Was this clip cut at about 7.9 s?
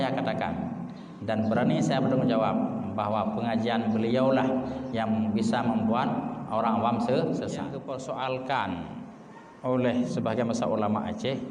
yes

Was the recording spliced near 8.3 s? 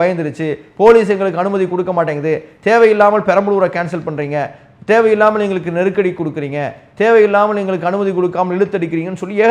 no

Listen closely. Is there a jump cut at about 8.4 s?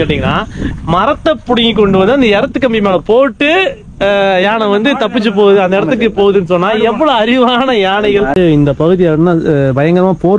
yes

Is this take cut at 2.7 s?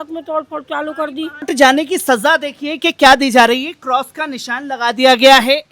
no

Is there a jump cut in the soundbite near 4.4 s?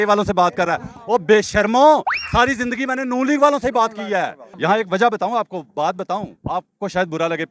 yes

